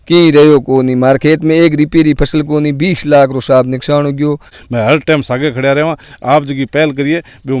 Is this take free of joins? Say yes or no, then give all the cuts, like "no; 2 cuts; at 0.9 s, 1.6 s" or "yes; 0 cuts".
no; 1 cut; at 4.6 s